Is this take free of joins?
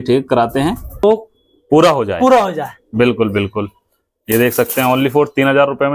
no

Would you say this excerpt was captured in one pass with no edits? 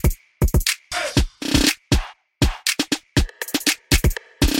yes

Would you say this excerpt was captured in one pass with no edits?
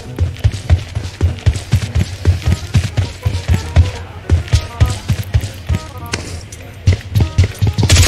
yes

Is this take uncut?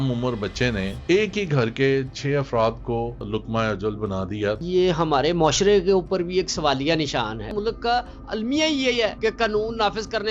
no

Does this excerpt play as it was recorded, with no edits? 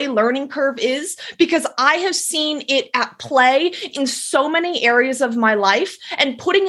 yes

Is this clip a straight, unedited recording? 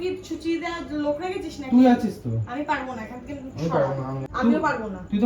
no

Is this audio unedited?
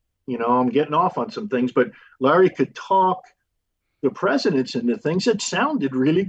yes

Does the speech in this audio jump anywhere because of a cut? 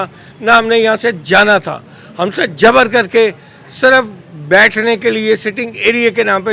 no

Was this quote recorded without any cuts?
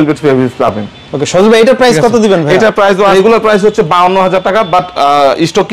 yes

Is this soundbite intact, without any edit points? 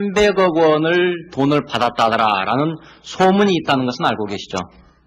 no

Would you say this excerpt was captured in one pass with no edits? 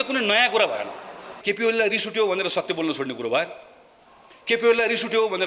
no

